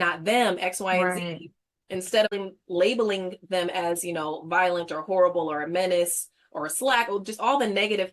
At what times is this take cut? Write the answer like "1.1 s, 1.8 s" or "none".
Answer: 2.3 s